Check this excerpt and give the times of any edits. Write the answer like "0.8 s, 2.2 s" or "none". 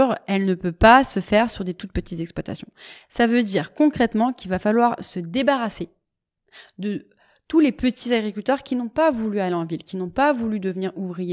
none